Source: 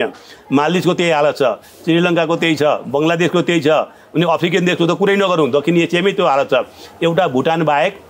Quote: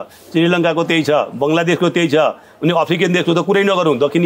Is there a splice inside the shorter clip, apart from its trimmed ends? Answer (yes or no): no